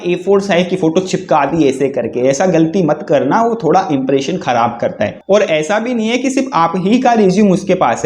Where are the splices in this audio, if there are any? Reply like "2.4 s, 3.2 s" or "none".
5.2 s